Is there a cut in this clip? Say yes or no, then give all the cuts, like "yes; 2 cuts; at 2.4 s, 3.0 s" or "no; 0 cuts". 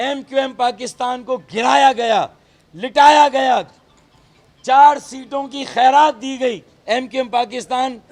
no; 0 cuts